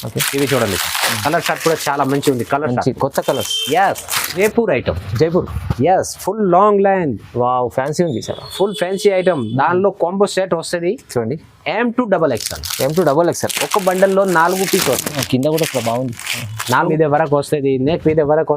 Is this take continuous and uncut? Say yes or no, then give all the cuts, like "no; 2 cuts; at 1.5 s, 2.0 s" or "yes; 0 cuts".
no; 2 cuts; at 4.3 s, 16.9 s